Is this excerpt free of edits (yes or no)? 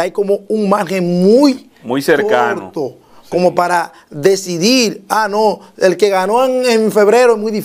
yes